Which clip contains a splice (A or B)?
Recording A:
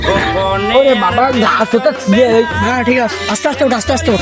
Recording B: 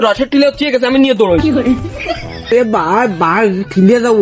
B